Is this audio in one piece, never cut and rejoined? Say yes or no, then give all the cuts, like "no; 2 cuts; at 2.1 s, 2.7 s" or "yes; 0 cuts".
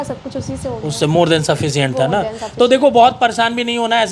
yes; 0 cuts